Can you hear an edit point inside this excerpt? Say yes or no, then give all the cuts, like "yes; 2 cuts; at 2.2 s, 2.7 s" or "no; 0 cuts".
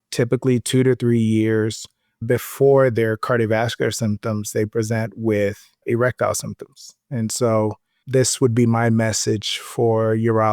yes; 1 cut; at 5.8 s